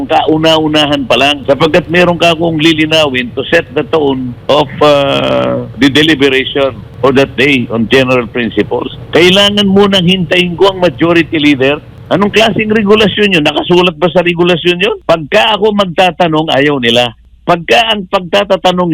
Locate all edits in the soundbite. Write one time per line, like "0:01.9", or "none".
0:01.4
0:04.3
0:05.7
0:06.8
0:09.0
0:11.9
0:15.0
0:17.3

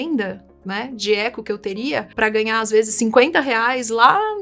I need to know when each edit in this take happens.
0:02.1

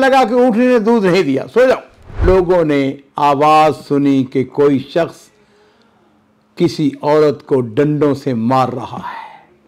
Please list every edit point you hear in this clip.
0:02.2

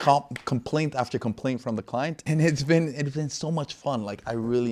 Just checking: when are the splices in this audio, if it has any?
0:02.3

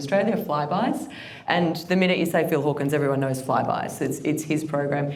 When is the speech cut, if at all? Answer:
none

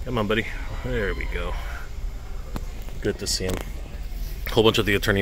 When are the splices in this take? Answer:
none

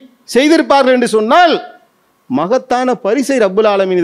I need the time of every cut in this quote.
none

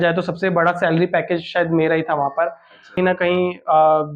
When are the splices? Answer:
0:03.0

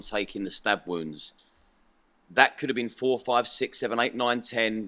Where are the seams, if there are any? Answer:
none

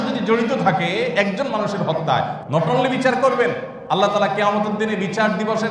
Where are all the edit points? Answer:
0:02.4
0:03.7

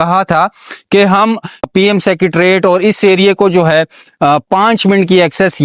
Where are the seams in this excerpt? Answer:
0:01.7

